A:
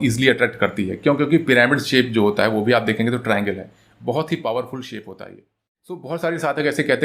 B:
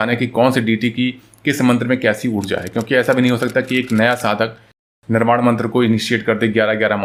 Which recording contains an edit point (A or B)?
A